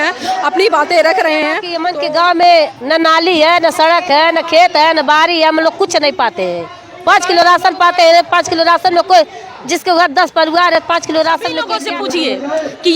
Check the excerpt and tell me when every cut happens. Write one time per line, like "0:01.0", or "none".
0:01.7
0:11.8